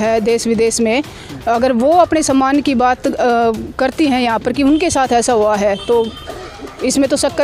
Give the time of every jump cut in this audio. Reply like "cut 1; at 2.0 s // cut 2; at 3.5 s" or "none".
none